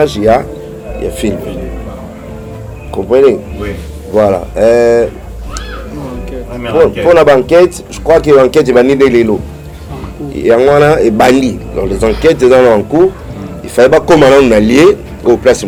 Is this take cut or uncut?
uncut